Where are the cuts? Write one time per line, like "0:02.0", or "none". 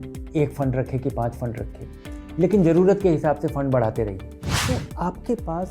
0:04.6